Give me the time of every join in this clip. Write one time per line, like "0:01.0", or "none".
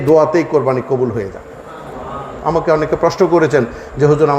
0:02.3